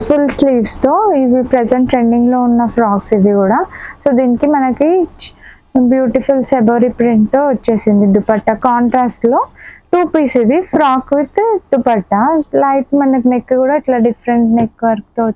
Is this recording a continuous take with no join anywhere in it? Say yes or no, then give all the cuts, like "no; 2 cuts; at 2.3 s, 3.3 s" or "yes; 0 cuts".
yes; 0 cuts